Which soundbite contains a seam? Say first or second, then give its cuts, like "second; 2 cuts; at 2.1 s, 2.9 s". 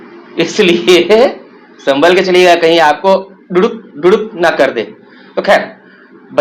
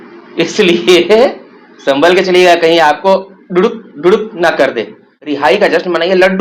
second; 1 cut; at 5.5 s